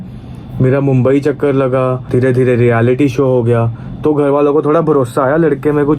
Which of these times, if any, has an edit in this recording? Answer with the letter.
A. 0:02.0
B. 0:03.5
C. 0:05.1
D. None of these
A